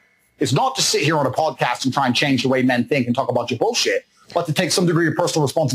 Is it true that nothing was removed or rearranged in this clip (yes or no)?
yes